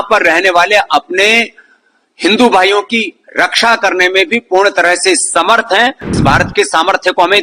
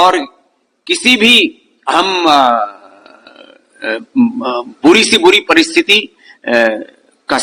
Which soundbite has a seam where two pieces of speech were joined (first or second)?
first